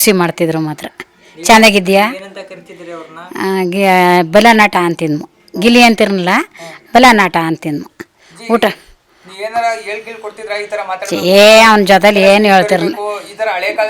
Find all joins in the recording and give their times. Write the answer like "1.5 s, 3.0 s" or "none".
none